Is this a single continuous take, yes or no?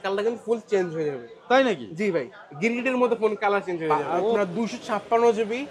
no